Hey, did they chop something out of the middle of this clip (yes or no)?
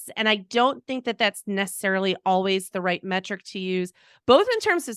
no